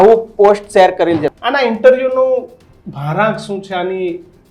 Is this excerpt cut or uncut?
cut